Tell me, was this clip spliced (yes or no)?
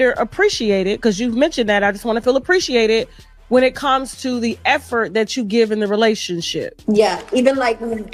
no